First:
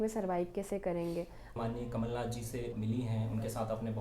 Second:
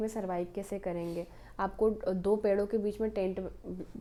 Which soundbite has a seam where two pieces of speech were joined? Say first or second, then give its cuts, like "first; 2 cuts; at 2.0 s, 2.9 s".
first; 1 cut; at 1.5 s